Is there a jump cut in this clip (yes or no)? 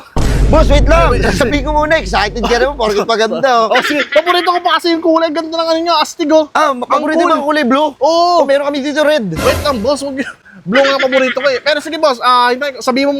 no